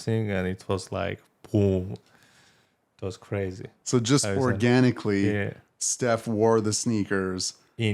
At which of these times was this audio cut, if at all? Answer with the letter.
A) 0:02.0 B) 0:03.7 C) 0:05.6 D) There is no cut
D